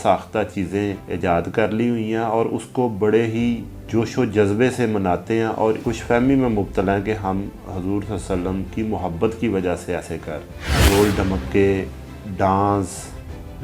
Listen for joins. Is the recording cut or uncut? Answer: cut